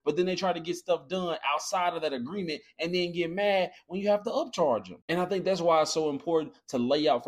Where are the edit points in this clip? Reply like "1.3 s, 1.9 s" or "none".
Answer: 4.9 s